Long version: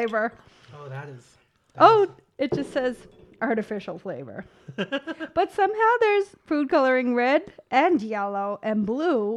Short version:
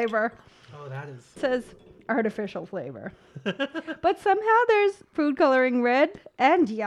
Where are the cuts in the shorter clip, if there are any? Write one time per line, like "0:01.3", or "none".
0:01.4